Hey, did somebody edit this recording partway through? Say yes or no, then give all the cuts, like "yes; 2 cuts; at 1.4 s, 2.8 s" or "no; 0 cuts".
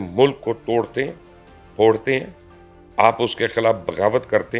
no; 0 cuts